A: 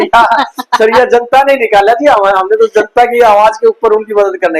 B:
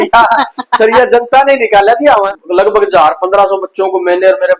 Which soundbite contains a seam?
B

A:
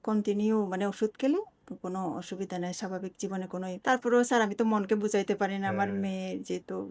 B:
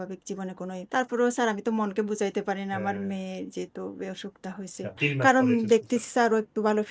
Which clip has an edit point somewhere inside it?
B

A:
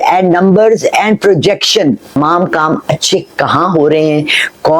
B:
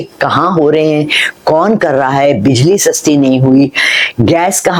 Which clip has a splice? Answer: A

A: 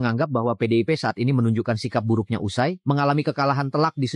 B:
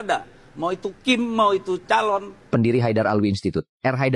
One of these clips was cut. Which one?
B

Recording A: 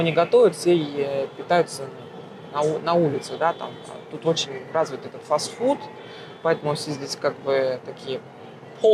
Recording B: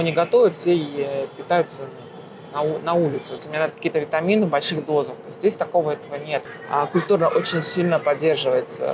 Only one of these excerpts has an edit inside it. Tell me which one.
B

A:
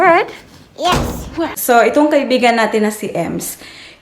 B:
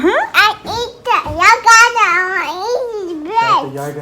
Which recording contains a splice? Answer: A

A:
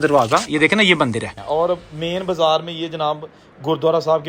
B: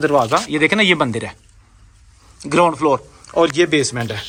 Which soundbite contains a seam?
A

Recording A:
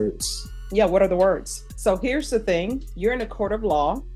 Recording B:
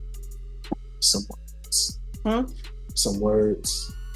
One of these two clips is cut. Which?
A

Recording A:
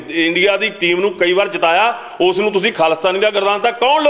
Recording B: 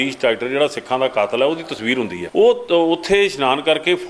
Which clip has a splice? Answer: B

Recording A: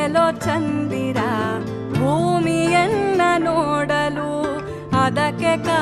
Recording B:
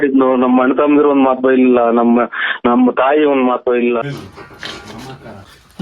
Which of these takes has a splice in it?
B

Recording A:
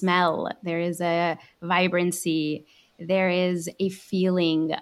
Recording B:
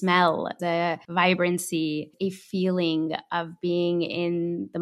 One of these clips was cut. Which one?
B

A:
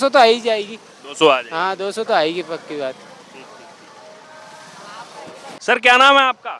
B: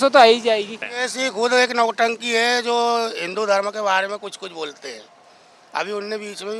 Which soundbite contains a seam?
B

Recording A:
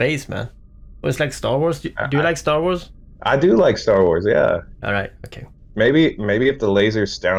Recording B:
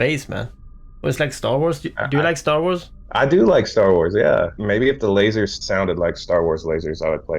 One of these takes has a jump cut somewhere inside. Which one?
B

